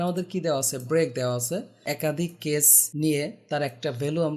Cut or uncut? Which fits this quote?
cut